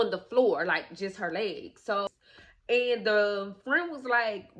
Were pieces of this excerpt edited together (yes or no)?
yes